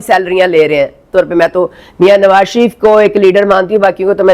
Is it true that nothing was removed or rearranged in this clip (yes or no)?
no